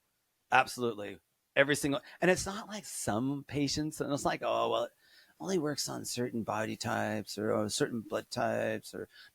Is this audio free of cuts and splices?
yes; 0 cuts

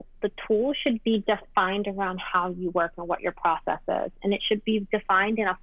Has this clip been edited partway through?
no; 0 cuts

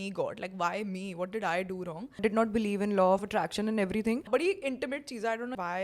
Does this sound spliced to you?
yes; 2 cuts; at 2.2 s, 4.2 s

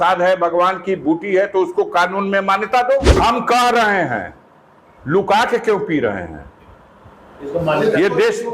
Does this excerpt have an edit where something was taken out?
yes; 1 cut; at 3.1 s

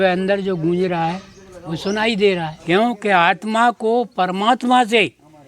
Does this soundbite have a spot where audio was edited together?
yes; 1 cut; at 2.5 s

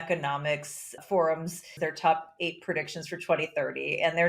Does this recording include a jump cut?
yes; 2 cuts; at 1.0 s, 1.7 s

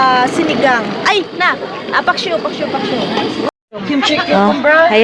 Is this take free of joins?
no; 1 cut; at 3.5 s

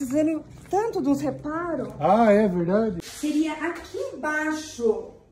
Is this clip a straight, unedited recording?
no; 1 cut; at 3.1 s

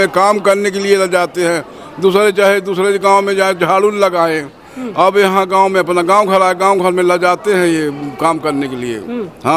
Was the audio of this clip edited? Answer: no; 0 cuts

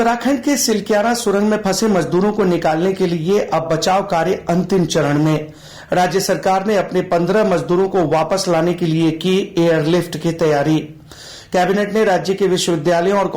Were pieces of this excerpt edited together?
no; 0 cuts

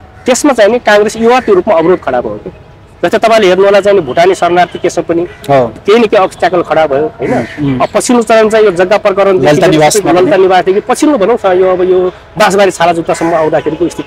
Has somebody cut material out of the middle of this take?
no; 0 cuts

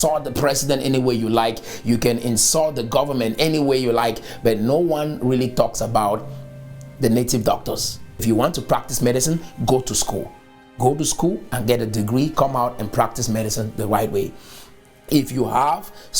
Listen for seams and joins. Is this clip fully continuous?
no; 1 cut; at 8.1 s

